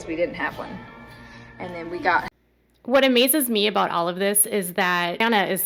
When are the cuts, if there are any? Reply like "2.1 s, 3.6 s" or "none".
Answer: none

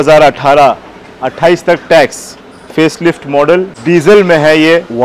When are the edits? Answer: 3.8 s

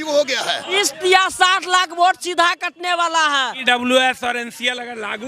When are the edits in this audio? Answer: 0.8 s, 3.5 s

